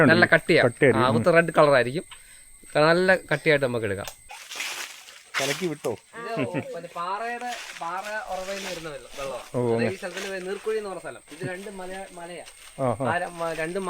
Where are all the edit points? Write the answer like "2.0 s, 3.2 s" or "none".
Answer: 4.1 s

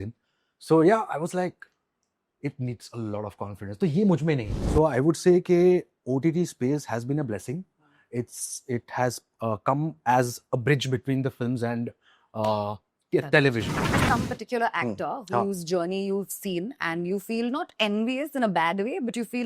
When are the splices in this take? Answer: 4.6 s, 14.0 s

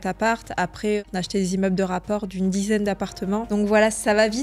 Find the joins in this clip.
1.1 s, 3.5 s

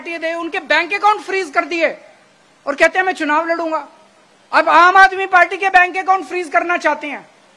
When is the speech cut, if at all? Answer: none

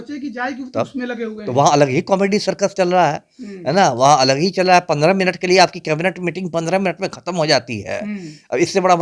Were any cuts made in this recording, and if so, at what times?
none

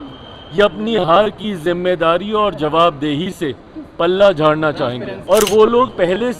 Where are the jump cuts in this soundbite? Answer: 5.1 s

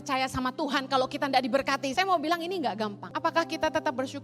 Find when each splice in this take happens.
1.9 s, 3.1 s

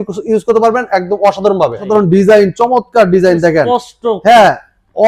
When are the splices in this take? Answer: 1.8 s

